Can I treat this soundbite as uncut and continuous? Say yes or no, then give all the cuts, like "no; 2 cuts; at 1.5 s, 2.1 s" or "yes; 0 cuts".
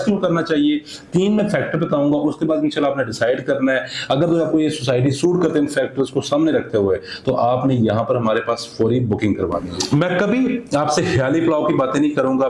yes; 0 cuts